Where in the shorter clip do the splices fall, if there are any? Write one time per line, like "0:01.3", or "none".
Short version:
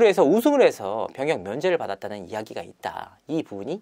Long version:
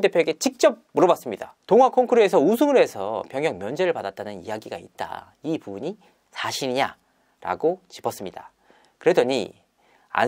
none